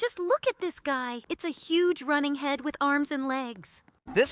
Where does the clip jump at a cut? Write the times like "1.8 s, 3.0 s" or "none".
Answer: 1.2 s